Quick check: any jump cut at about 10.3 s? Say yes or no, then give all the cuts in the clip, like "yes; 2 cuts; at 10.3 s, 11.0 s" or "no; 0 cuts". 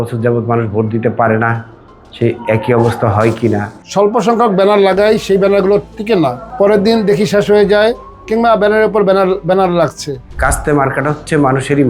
yes; 3 cuts; at 3.7 s, 6.4 s, 10.3 s